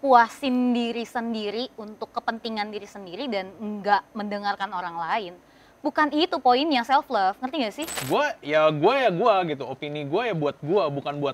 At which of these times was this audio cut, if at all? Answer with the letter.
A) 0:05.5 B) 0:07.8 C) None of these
B